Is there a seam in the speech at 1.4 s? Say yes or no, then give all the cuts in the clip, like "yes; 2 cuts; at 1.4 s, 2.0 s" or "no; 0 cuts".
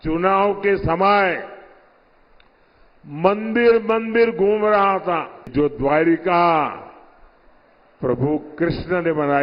no; 1 cut; at 5.5 s